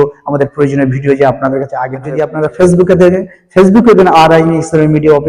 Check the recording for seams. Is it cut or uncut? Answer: cut